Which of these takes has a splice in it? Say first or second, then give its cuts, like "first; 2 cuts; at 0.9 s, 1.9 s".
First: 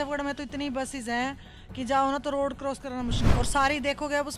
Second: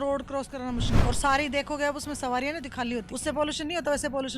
second; 1 cut; at 3.1 s